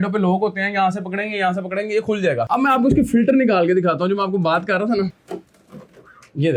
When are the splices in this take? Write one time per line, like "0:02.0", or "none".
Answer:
none

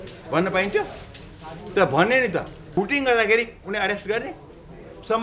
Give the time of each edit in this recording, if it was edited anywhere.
0:02.8

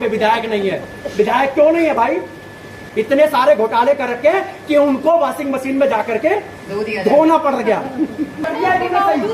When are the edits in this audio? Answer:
0:02.8
0:08.4

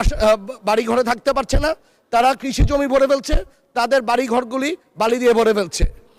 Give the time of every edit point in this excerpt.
none

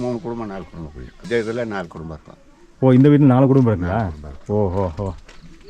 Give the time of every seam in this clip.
0:01.2

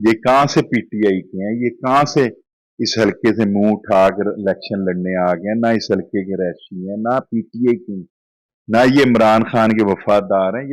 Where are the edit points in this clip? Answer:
none

